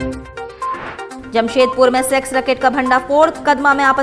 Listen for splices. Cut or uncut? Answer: cut